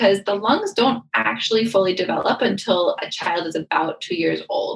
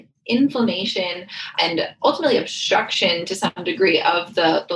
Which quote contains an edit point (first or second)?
second